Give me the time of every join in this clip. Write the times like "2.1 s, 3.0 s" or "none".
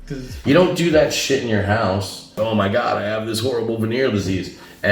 2.4 s